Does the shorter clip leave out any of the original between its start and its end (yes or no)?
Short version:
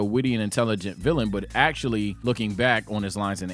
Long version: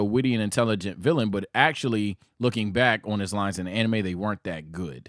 yes